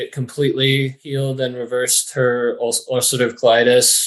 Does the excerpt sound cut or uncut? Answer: cut